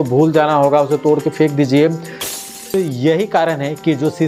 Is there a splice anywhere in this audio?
yes; 1 cut; at 2.3 s

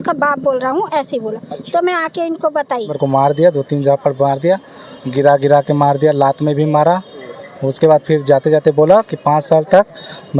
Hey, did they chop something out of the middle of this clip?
yes; 1 cut; at 2.9 s

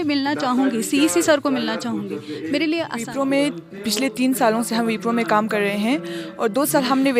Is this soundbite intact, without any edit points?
no; 1 cut; at 3.0 s

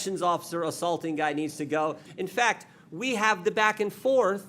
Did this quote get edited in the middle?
yes; 1 cut; at 2.1 s

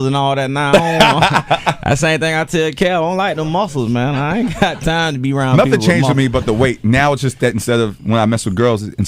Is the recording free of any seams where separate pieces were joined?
no; 1 cut; at 4.4 s

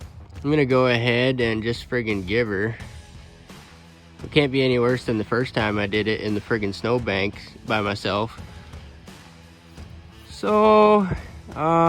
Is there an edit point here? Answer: yes; 2 cuts; at 8.8 s, 10.3 s

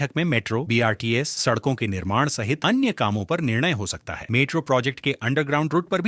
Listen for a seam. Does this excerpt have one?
no; 0 cuts

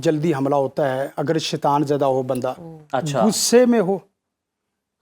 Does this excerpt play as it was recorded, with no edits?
yes; 0 cuts

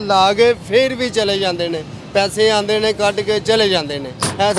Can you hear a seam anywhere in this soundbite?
no; 0 cuts

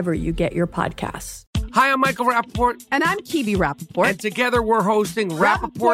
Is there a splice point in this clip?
yes; 1 cut; at 1.3 s

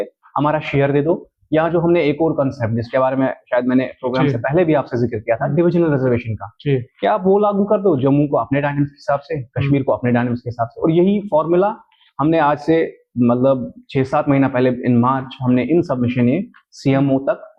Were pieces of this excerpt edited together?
no; 0 cuts

